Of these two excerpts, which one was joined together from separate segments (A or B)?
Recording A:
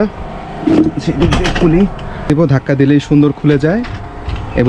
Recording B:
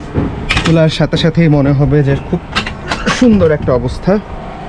A